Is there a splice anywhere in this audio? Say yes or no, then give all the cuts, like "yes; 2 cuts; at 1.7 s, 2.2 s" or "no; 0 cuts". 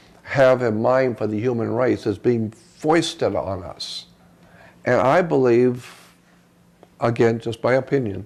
no; 0 cuts